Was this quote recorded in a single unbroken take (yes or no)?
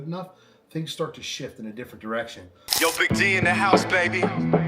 no